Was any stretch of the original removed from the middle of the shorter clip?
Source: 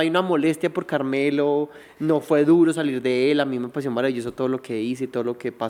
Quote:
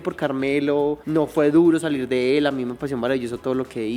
yes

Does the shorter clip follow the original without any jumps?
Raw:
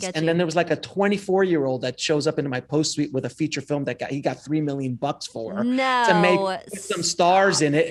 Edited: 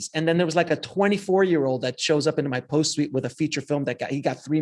yes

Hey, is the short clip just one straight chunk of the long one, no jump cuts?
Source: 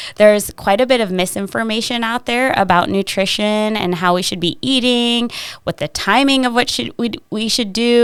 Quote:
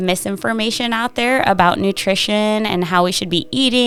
yes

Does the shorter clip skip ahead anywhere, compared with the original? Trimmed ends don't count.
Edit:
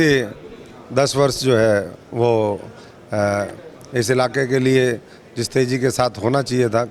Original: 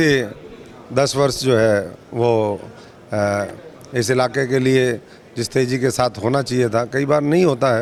no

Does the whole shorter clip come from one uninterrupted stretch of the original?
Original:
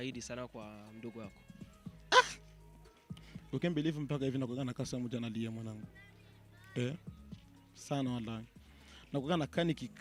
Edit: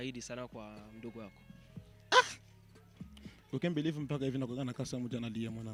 yes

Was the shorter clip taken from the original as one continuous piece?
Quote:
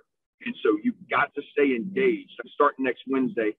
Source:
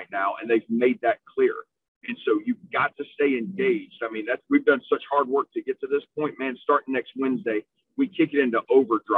no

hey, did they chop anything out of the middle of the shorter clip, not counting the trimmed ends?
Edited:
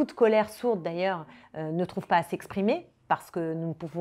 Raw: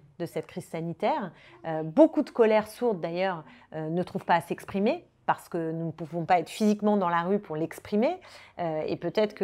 no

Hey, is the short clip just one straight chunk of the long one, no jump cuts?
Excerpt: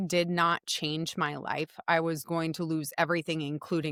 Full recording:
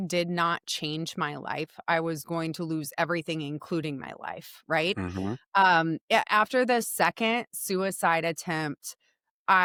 yes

